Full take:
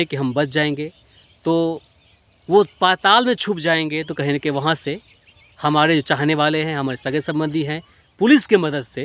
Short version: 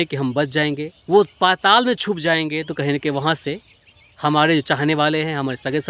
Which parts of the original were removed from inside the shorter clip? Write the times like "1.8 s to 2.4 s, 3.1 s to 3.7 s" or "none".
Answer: 0.9 s to 2.3 s